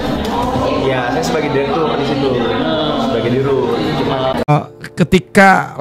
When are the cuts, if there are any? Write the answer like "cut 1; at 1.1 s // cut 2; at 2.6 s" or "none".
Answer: cut 1; at 4.5 s